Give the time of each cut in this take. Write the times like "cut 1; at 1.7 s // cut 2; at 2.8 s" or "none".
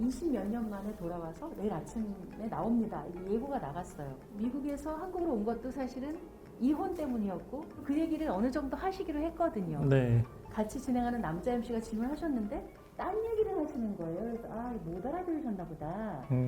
cut 1; at 4.2 s // cut 2; at 7.8 s // cut 3; at 10.4 s